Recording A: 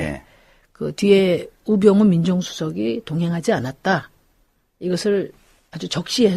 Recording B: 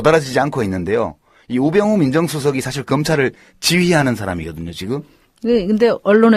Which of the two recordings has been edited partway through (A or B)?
A